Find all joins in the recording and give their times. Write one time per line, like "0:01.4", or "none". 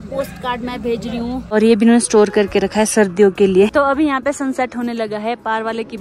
0:01.5
0:03.7